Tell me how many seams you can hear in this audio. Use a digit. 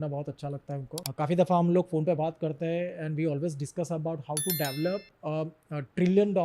1